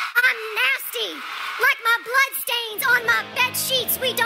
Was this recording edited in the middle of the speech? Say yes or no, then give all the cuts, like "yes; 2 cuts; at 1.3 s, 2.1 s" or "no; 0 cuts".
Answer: no; 0 cuts